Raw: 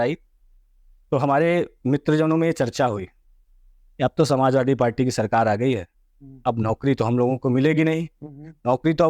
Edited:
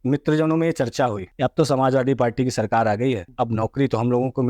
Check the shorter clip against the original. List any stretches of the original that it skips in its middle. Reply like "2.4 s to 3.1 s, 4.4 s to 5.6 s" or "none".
3.1 s to 3.9 s, 5.9 s to 6.3 s